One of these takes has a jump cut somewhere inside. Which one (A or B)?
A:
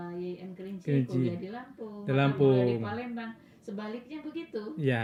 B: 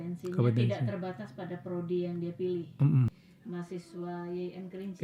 B